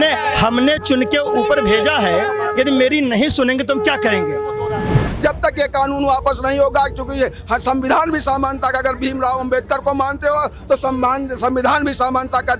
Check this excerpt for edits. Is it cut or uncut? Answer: cut